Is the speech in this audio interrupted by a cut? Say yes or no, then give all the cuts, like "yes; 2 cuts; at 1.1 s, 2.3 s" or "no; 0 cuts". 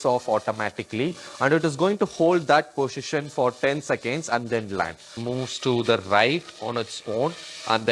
yes; 1 cut; at 5.2 s